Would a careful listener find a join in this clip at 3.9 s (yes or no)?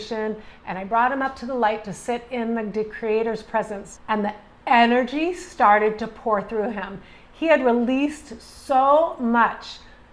yes